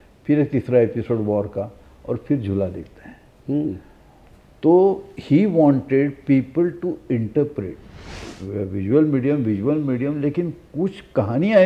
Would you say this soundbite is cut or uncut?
cut